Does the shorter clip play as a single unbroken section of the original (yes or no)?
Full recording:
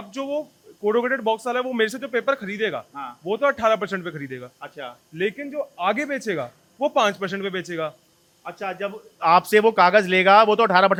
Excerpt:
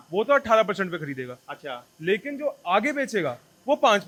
yes